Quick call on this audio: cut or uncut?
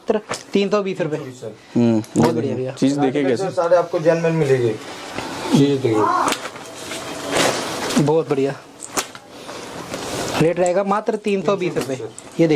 uncut